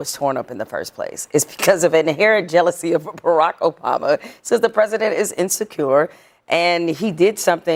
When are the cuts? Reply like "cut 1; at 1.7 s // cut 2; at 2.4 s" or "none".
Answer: none